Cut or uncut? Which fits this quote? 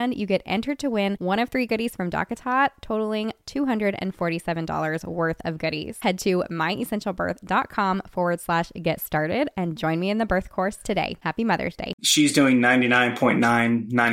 cut